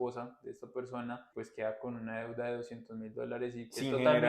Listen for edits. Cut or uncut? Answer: cut